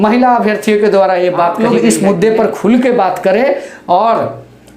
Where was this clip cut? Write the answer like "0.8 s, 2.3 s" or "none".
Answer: 1.6 s